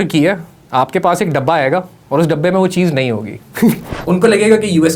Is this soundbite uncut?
no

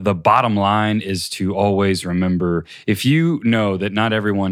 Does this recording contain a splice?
yes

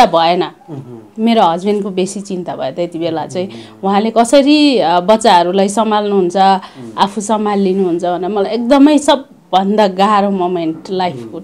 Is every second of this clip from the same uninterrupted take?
yes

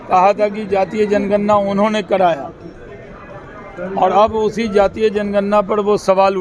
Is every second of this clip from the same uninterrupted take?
yes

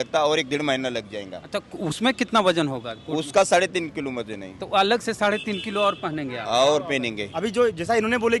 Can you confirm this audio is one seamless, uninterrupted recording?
no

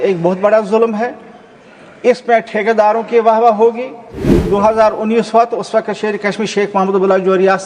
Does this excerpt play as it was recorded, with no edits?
no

